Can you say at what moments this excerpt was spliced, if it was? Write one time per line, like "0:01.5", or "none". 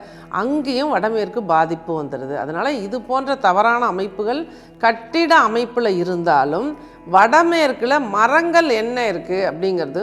none